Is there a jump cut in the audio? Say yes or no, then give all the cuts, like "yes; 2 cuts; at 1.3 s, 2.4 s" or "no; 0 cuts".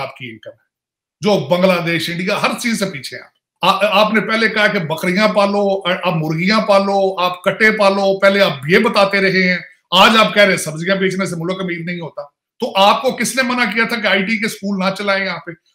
yes; 1 cut; at 3.4 s